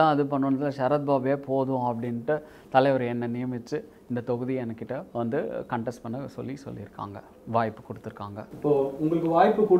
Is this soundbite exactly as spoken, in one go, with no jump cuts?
yes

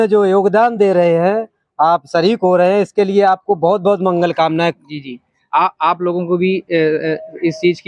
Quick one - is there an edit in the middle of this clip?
no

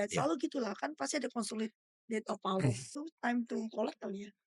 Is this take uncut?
no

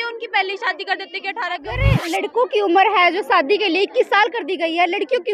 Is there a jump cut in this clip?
yes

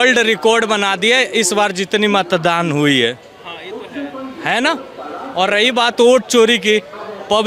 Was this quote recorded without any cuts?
yes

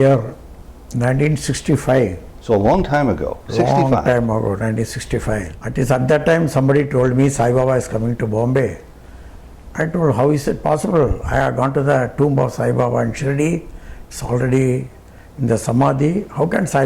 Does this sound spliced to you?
yes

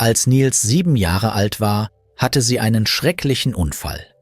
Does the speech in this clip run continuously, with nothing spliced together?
no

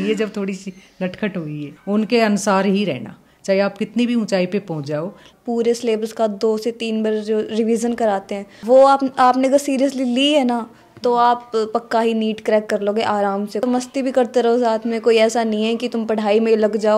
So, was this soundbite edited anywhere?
yes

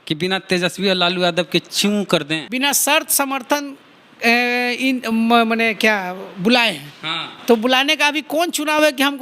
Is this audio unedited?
no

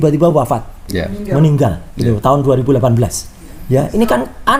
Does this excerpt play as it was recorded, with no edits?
yes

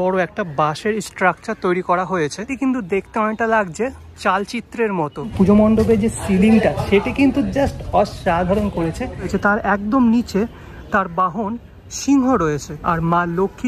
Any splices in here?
yes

